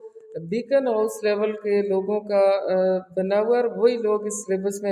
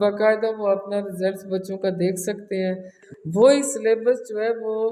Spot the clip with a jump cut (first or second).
second